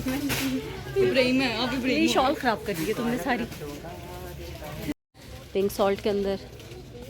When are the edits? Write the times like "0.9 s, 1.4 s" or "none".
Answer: 5.1 s